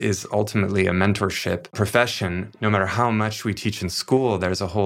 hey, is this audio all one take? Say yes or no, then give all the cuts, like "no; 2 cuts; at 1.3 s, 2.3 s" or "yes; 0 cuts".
no; 1 cut; at 1.7 s